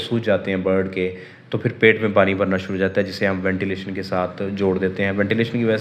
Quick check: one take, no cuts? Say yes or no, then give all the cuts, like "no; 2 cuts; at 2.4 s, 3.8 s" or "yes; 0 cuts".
yes; 0 cuts